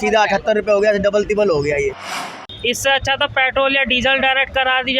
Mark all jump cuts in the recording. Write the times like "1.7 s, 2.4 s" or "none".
2.5 s

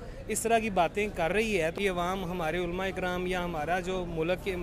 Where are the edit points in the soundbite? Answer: 1.7 s

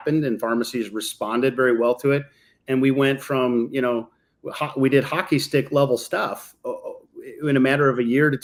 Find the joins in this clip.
none

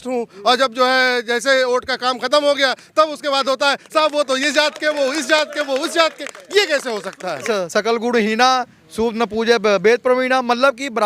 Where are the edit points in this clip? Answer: 7.5 s

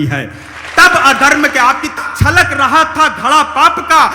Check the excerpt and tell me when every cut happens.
2.0 s

